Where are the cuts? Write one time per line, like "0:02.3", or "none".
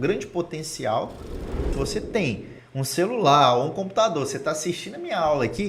0:01.7